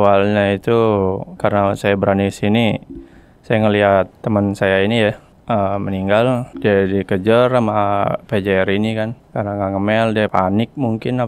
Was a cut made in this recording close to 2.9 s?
no; 5 cuts; at 4.2 s, 5.3 s, 6.5 s, 9.2 s, 10.3 s

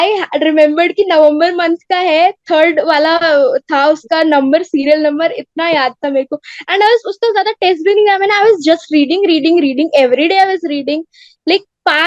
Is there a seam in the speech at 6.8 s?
no; 0 cuts

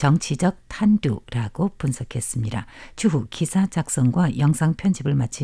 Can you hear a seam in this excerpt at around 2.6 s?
yes; 1 cut; at 2.6 s

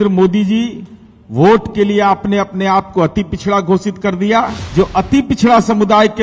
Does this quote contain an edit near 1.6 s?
no; 1 cut; at 4.6 s

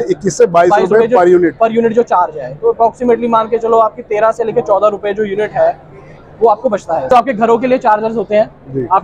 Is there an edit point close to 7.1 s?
yes; 1 cut; at 7.1 s

